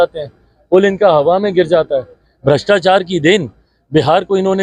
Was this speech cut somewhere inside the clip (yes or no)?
no